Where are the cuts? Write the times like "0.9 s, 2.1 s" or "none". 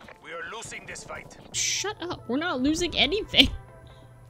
1.6 s